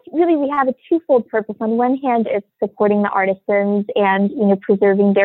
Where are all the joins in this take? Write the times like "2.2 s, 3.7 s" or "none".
none